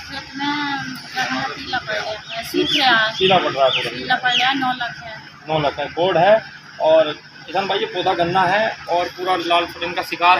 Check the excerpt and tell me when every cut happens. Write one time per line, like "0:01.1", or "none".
none